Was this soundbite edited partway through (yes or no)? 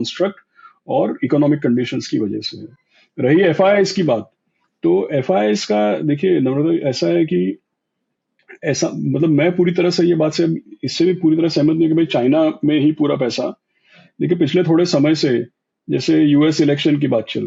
no